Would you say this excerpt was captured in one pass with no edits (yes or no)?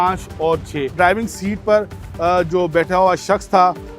no